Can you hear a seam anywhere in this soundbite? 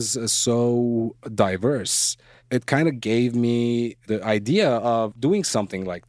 yes; 3 cuts; at 2.4 s, 4.0 s, 5.1 s

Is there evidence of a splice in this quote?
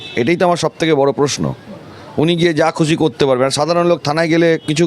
no; 0 cuts

